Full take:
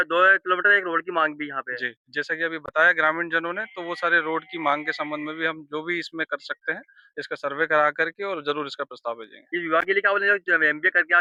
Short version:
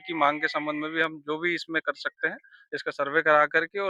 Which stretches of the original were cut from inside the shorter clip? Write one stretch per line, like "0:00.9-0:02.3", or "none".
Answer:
none